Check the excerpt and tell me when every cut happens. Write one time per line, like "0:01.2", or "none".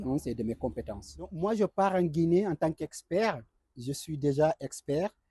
0:01.4